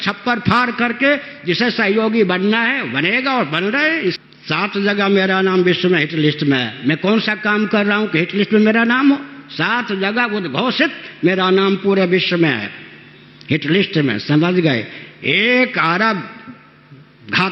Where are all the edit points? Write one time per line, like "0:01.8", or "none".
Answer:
0:04.2